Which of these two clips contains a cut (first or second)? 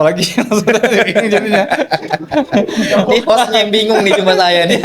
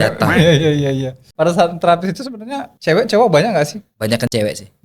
second